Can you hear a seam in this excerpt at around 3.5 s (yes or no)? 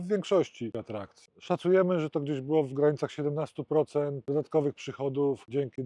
no